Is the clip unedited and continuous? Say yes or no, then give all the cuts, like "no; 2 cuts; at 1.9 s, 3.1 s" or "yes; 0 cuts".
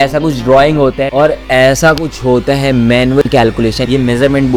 yes; 0 cuts